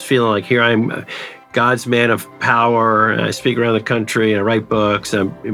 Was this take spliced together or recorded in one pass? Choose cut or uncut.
uncut